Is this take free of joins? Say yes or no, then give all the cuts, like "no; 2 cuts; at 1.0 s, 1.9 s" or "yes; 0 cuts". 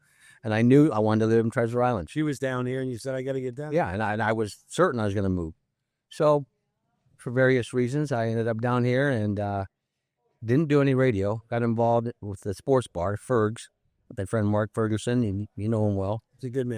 yes; 0 cuts